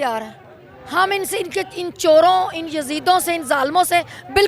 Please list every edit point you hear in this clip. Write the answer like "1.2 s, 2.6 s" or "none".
none